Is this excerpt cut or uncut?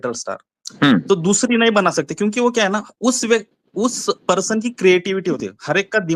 uncut